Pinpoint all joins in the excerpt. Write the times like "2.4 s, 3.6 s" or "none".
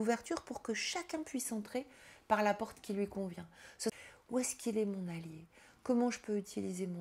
4.0 s